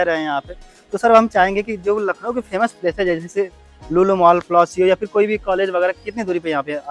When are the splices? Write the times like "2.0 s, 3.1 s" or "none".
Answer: none